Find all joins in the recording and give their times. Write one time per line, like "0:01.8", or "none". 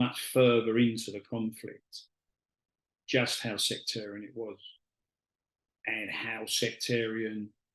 none